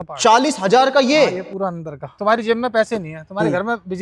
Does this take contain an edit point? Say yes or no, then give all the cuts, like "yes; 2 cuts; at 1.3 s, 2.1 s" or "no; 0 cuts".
yes; 1 cut; at 2.0 s